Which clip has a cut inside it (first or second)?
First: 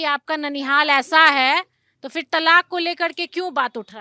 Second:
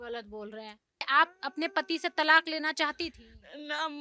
second